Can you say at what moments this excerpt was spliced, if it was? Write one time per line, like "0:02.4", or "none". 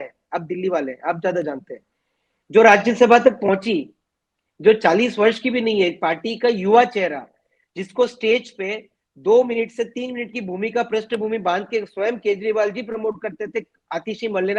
none